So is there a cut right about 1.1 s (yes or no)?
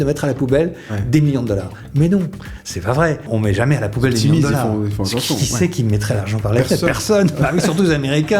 no